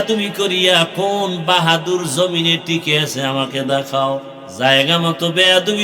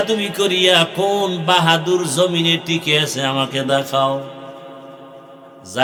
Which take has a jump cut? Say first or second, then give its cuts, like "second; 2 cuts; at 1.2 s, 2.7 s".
first; 1 cut; at 4.4 s